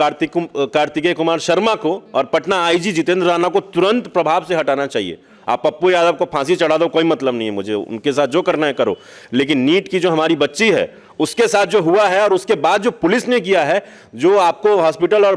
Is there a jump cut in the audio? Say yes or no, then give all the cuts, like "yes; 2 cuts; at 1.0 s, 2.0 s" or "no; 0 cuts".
no; 0 cuts